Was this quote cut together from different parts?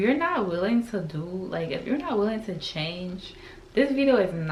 no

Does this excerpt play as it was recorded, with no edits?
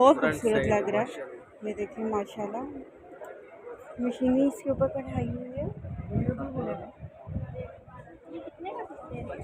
yes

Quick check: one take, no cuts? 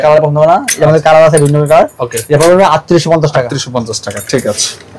yes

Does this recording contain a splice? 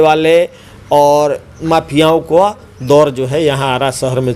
no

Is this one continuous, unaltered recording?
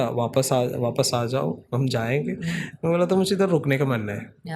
yes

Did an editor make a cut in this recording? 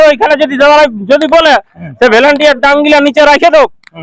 no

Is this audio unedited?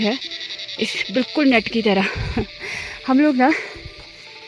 yes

